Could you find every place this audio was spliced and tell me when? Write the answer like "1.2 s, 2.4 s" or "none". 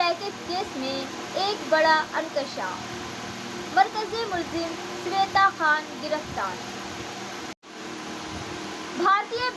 7.6 s